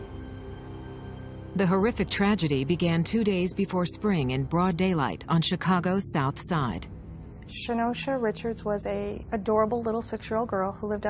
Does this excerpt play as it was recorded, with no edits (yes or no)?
no